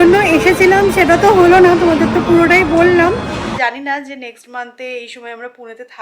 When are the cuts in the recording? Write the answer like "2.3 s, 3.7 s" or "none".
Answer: 3.4 s